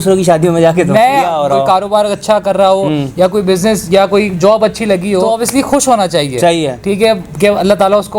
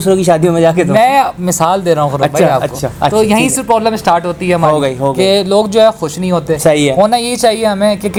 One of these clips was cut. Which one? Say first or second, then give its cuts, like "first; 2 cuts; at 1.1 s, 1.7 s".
first; 2 cuts; at 1.3 s, 5.2 s